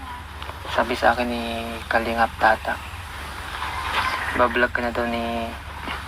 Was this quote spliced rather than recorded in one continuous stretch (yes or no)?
yes